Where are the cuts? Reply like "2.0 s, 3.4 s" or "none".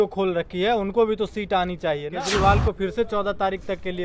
2.1 s